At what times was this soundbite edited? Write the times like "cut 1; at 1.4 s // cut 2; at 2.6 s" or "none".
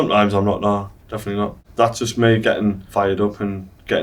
cut 1; at 1.6 s